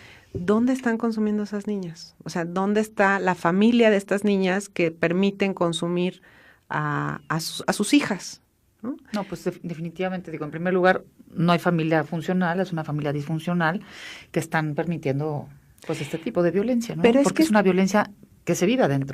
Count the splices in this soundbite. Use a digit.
1